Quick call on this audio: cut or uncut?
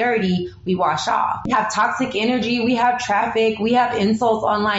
cut